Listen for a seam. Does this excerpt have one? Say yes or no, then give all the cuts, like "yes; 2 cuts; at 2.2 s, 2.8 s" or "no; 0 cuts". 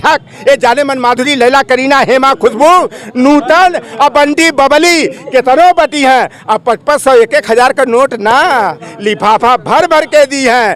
no; 0 cuts